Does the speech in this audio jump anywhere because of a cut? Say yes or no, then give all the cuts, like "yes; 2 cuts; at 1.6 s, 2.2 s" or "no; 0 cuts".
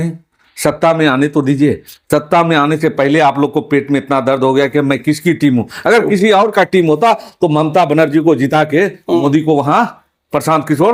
no; 0 cuts